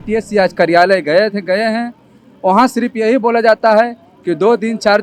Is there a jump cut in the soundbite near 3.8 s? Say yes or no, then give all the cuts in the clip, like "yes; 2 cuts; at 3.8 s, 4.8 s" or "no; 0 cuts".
no; 0 cuts